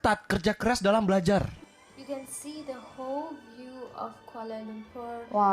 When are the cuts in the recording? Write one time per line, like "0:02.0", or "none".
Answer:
0:01.5